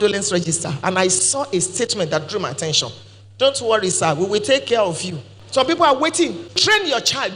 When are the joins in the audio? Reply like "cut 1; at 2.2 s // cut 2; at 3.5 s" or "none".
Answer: cut 1; at 6.5 s